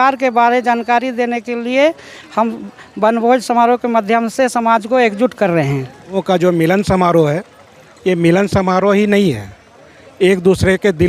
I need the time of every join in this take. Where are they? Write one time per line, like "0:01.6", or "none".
0:06.2